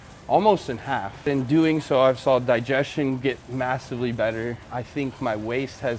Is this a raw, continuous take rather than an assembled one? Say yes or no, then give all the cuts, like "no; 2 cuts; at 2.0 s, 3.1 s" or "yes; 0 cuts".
no; 1 cut; at 1.3 s